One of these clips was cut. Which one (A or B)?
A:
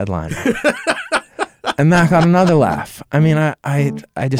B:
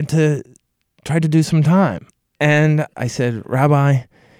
B